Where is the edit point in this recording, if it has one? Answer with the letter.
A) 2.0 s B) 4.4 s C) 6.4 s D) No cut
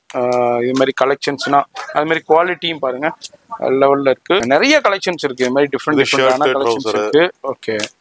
B